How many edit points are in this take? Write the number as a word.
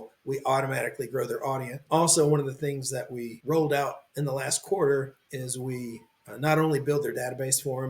two